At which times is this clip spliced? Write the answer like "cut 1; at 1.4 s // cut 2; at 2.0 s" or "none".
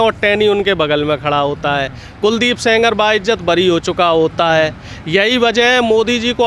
none